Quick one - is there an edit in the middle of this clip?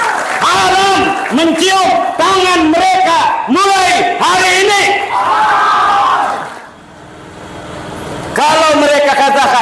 yes; 1 cut; at 6.6 s

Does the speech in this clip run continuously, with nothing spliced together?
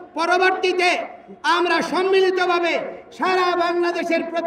yes; 0 cuts

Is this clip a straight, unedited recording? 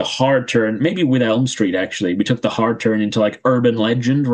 yes; 0 cuts

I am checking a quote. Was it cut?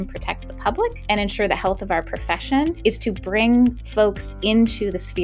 yes; 2 cuts; at 1.0 s, 2.8 s

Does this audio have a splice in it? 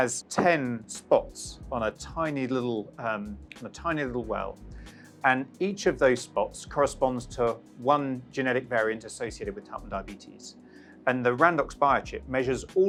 no; 0 cuts

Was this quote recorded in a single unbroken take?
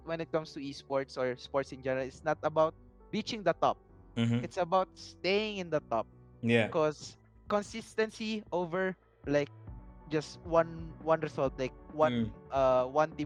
yes; 0 cuts

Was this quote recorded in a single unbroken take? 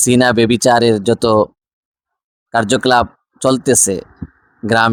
yes; 0 cuts

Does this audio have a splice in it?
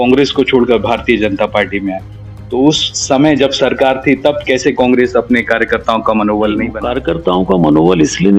yes; 1 cut; at 6.8 s

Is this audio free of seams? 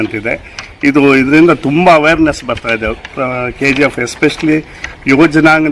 yes; 0 cuts

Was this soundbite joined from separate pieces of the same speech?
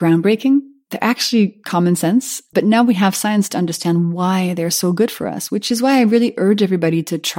no; 0 cuts

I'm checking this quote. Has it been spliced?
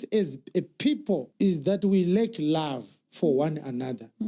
yes; 1 cut; at 1.3 s

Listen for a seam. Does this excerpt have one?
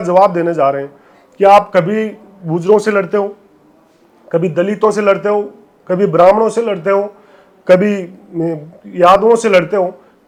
no; 0 cuts

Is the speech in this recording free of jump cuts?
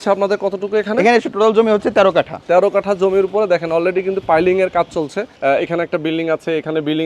no; 3 cuts; at 1.3 s, 2.4 s, 5.2 s

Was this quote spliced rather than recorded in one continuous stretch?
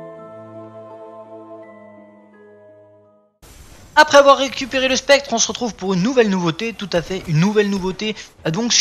yes; 1 cut; at 4.6 s

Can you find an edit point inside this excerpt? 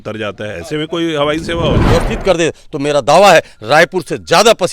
yes; 1 cut; at 1.8 s

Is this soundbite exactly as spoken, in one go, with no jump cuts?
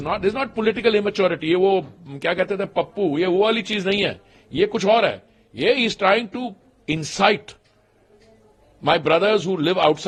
yes; 0 cuts

